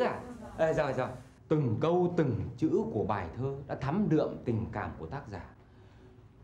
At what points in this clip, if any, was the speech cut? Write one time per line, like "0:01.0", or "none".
none